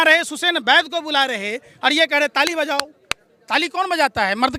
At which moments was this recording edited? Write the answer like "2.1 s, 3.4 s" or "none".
none

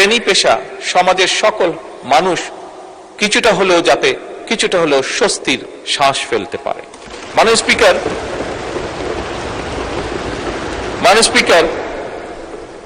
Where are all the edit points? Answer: none

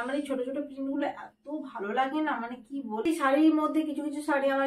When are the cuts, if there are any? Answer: 3.1 s

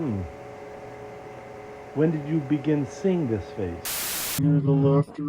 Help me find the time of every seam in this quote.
4.4 s

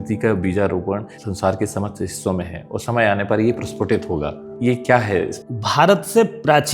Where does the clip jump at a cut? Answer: 1.2 s, 4.5 s, 5.4 s

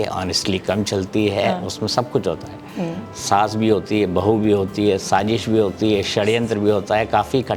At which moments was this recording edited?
none

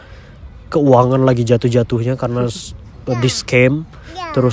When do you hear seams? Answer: none

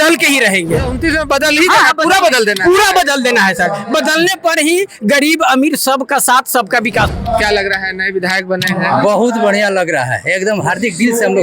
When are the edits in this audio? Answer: 7.1 s

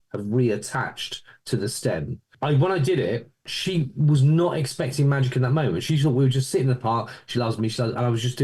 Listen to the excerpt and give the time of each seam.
2.3 s, 3.5 s

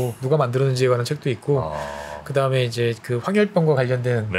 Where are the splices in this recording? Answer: none

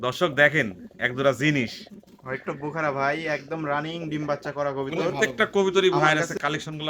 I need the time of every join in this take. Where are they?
5.1 s

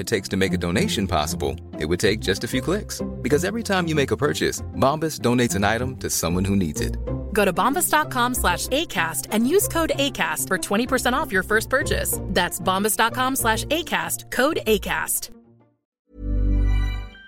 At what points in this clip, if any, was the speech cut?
15.9 s

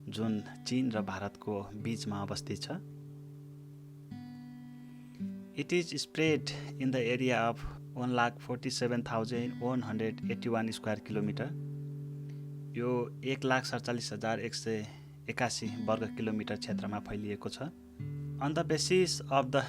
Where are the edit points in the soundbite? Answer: 2.8 s, 5.1 s

